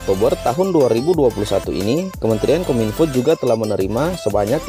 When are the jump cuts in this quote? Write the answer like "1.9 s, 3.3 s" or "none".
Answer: none